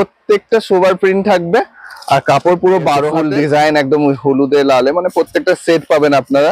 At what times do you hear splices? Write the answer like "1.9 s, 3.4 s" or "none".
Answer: 3.1 s